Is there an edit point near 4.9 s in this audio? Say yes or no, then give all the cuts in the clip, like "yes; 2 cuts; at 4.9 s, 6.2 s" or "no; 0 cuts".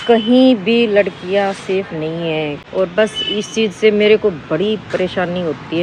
no; 1 cut; at 2.6 s